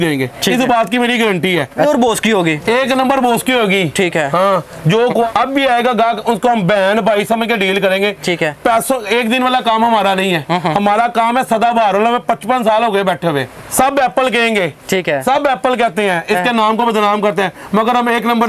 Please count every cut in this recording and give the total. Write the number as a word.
three